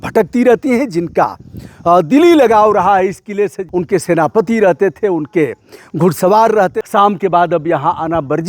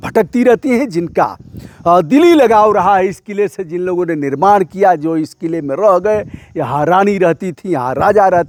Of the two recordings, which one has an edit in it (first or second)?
first